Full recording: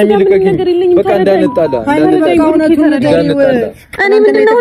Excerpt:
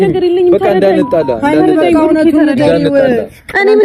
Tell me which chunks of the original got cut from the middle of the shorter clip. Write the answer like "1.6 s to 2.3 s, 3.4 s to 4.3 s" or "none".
none

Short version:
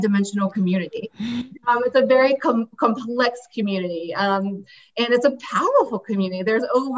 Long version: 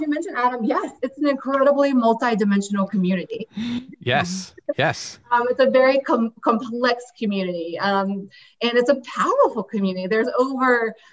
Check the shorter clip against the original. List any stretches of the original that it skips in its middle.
3.9 s to 5.2 s

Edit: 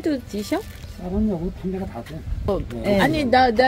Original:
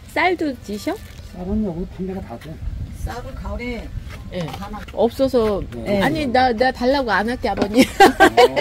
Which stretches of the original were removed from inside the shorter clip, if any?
2.8 s to 5.5 s

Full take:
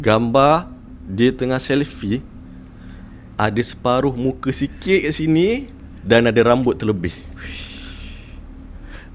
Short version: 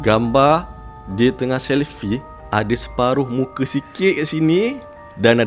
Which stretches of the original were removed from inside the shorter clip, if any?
2.3 s to 3.2 s

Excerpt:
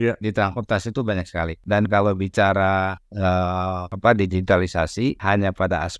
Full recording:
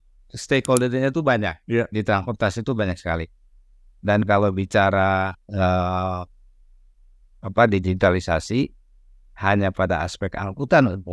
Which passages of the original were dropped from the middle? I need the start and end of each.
3.3 s to 3.9 s, 6.2 s to 7.4 s, 8.7 s to 9.4 s

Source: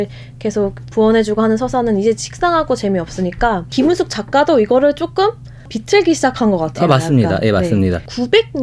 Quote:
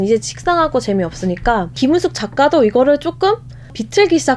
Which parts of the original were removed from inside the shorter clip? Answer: none

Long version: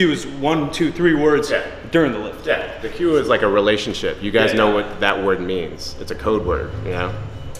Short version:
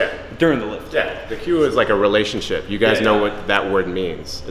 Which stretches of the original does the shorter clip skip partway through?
none

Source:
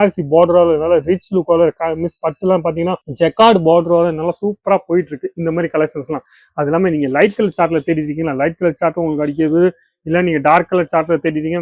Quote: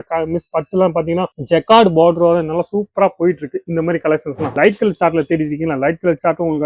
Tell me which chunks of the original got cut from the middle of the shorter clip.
6.2 s to 7.1 s

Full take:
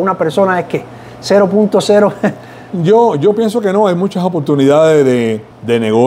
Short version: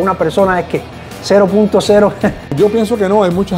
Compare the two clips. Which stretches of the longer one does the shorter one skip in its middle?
2.5 s to 3.2 s

